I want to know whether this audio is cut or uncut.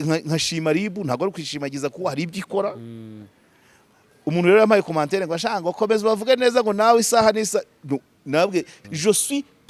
cut